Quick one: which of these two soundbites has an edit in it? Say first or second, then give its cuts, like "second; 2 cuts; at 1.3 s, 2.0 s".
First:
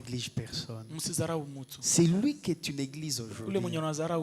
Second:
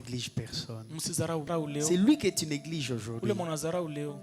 second; 1 cut; at 1.5 s